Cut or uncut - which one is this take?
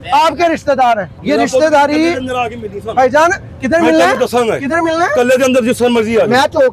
cut